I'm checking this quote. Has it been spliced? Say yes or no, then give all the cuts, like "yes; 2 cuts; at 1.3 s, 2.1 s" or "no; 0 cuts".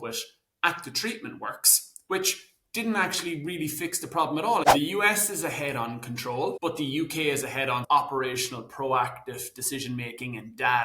yes; 2 cuts; at 4.7 s, 6.6 s